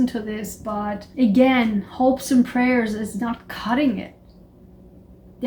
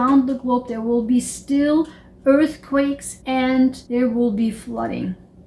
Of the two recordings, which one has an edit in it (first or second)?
second